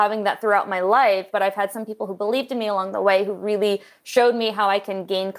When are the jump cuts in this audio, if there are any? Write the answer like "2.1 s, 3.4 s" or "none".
1.3 s